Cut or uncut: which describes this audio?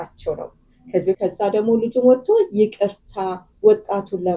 cut